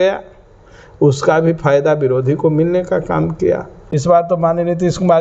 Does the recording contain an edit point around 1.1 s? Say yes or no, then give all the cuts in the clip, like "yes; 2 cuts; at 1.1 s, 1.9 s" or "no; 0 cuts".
no; 1 cut; at 3.7 s